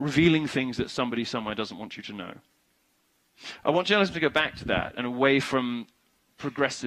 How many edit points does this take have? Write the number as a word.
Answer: one